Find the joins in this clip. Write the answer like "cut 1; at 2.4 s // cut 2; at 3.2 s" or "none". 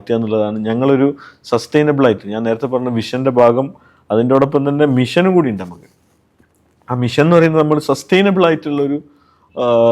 none